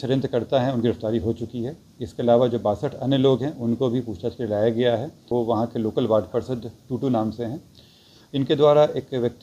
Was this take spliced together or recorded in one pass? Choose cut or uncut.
cut